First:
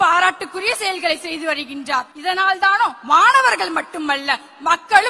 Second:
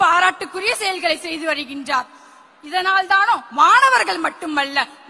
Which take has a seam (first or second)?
first